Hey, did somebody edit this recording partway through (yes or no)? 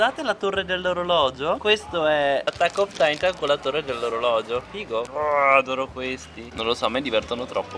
no